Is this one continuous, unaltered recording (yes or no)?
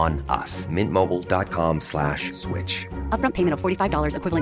yes